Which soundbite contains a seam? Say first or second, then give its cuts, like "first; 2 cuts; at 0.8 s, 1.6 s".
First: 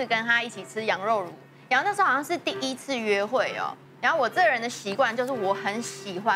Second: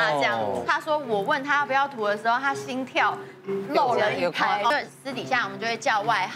second; 1 cut; at 4.7 s